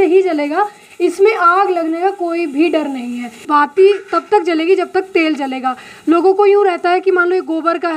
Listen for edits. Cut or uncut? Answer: cut